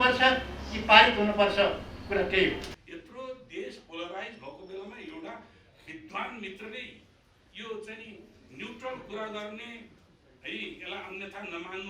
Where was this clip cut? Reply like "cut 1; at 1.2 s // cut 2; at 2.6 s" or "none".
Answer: cut 1; at 2.7 s